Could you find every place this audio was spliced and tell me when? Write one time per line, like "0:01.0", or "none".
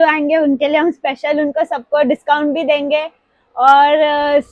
none